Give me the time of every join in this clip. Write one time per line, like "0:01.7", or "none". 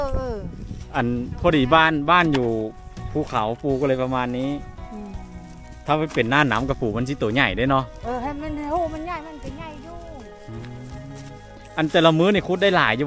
none